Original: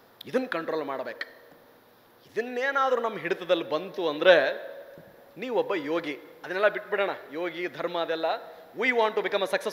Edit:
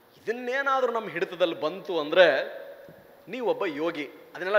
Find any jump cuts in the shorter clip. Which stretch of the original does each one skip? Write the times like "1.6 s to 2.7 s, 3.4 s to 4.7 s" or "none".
none